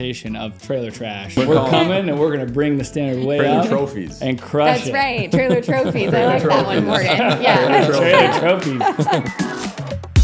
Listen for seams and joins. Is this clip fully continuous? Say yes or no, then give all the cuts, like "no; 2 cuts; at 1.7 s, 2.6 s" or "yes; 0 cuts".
no; 2 cuts; at 1.4 s, 9.3 s